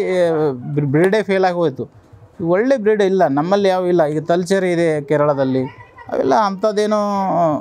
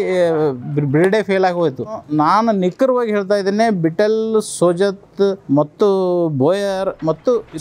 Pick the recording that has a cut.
second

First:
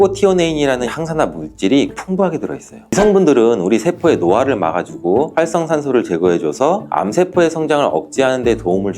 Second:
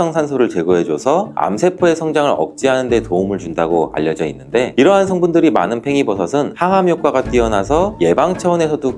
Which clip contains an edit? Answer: first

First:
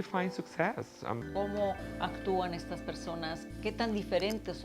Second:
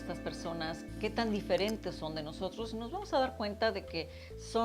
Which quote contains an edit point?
first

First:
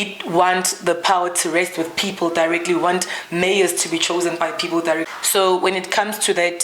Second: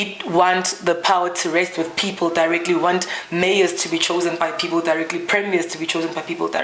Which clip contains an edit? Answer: first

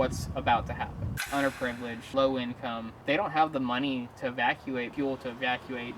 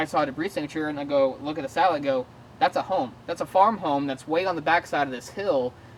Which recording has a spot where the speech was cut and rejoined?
first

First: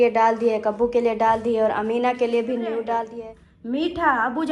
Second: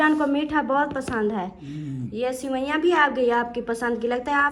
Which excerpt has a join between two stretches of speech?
first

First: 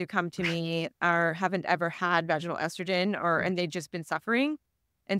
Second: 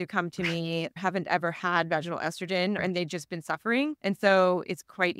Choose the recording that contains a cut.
second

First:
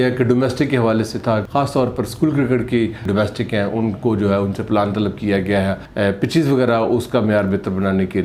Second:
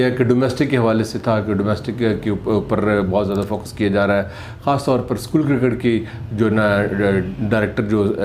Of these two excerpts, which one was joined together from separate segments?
first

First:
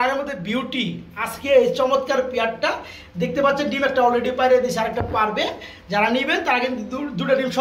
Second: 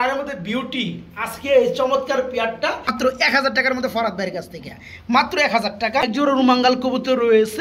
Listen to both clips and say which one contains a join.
second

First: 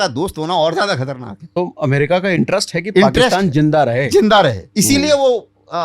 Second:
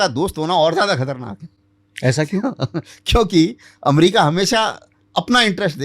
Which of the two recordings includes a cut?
first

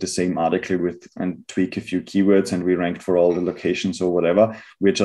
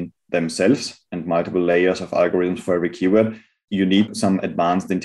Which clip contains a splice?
second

